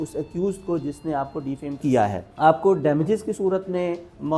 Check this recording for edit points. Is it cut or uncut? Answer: uncut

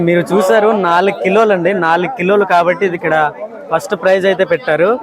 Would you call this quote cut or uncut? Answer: uncut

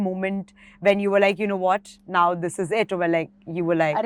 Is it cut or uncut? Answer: uncut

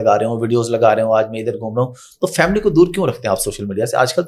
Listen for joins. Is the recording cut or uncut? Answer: uncut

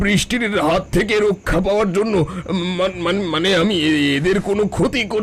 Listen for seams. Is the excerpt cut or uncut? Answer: uncut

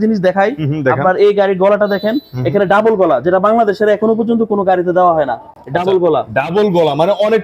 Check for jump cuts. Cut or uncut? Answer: uncut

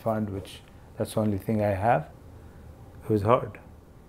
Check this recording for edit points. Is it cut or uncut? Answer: cut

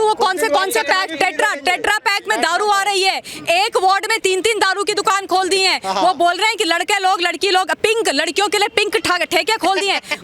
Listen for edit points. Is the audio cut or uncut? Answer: uncut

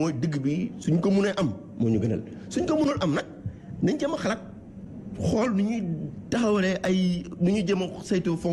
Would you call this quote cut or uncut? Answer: cut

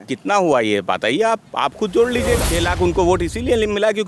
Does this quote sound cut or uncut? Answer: cut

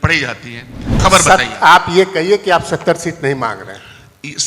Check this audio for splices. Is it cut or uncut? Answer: cut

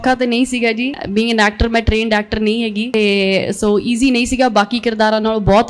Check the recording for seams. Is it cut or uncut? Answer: cut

